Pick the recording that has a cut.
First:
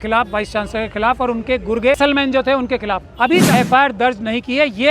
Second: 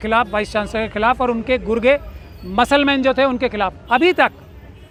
first; 2 cuts; at 2.0 s, 3.5 s

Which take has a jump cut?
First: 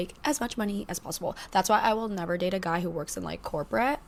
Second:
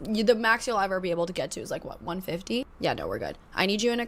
second; 1 cut; at 1.4 s

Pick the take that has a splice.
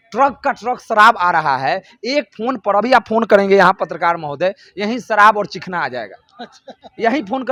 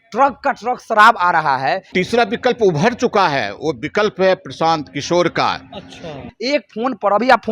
second; 2 cuts; at 1.9 s, 6.3 s

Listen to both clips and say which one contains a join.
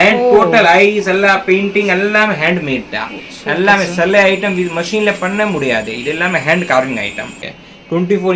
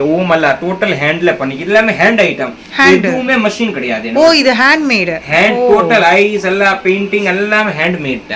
first; 1 cut; at 7.3 s

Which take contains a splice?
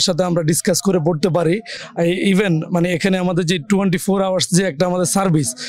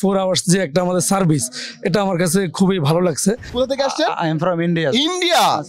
second; 1 cut; at 3.5 s

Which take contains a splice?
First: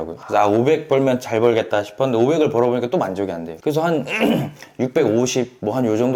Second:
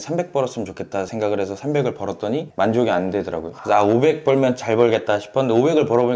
second; 1 cut; at 1.1 s

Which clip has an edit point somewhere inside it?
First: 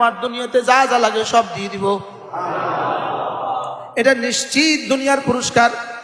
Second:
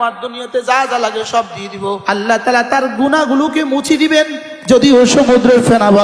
second; 1 cut; at 2.0 s

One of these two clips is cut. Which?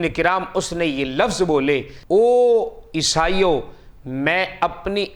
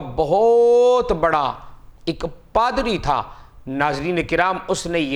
first; 1 cut; at 1.9 s

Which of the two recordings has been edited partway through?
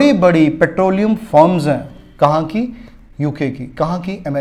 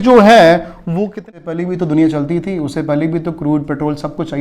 second; 1 cut; at 1.1 s

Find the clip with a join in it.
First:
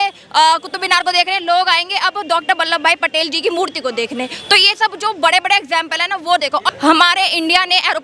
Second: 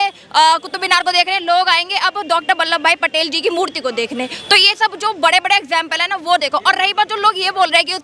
first; 1 cut; at 6.7 s

